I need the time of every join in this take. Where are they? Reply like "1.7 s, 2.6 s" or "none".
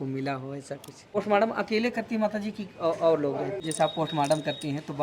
1.2 s, 3.7 s